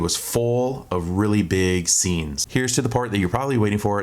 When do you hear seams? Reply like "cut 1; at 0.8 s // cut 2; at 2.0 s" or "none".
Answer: cut 1; at 2.4 s

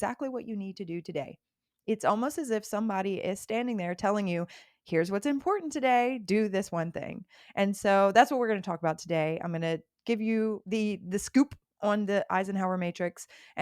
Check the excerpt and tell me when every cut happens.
cut 1; at 10.6 s

